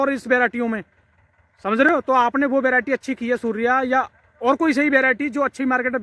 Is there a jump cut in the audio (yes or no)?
no